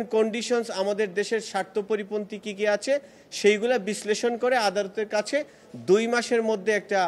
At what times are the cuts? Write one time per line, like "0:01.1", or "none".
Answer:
none